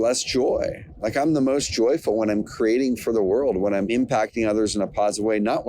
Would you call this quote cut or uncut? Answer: cut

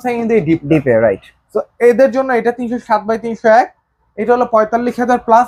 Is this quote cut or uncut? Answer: uncut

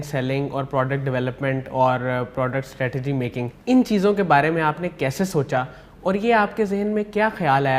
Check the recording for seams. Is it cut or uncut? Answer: cut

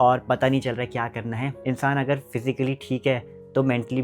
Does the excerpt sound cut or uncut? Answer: cut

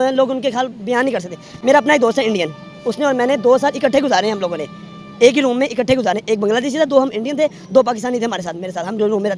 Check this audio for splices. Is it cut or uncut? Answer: uncut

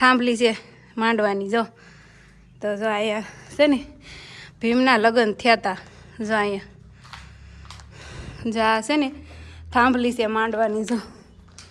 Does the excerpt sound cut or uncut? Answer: uncut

